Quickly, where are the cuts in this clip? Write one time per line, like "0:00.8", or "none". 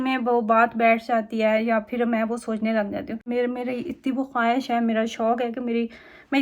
0:03.2